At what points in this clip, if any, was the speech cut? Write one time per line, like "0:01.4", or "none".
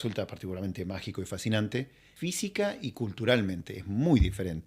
0:02.0